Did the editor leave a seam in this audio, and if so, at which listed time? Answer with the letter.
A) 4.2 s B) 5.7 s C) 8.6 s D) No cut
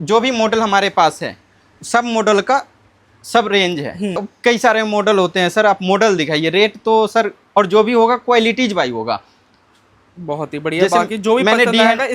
A